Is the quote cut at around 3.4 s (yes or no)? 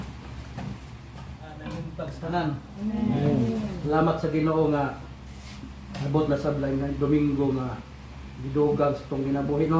no